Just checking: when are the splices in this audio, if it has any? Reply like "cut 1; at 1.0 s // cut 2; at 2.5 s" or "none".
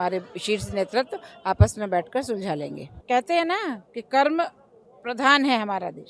cut 1; at 3.0 s